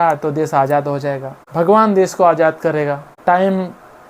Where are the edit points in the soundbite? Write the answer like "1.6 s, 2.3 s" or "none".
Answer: 1.3 s, 3.1 s